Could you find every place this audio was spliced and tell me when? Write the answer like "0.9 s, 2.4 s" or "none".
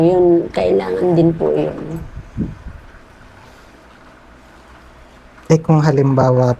none